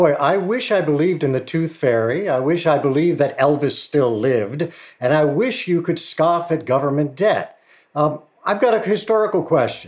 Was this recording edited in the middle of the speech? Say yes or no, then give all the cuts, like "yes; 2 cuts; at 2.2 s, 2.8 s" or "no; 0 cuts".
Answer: no; 0 cuts